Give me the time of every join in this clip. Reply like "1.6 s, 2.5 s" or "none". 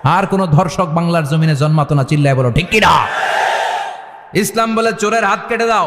4.4 s

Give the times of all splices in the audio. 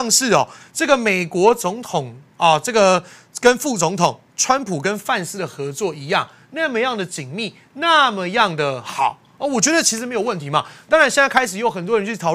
none

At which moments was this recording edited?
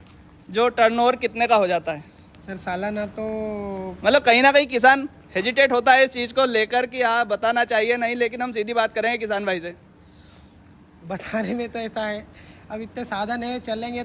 none

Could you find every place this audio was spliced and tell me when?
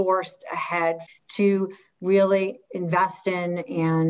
1.0 s

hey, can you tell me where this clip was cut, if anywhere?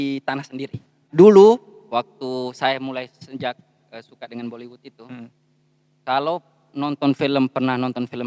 1.0 s

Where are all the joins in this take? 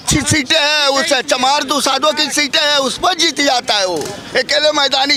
none

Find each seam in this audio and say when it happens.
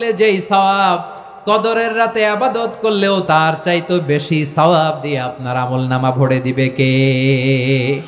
3.2 s

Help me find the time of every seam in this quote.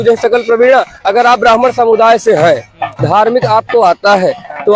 none

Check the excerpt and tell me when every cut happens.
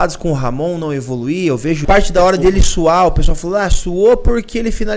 1.8 s

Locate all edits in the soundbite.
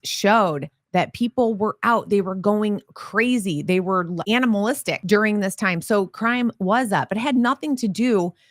4.2 s, 4.9 s

